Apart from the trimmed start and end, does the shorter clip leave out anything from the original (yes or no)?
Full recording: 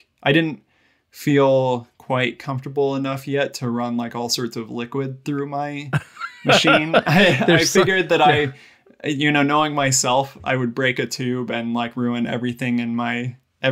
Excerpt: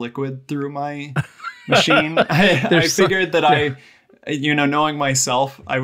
no